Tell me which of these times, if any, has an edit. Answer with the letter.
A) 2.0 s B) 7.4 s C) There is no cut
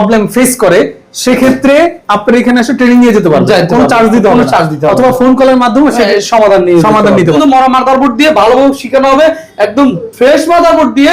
B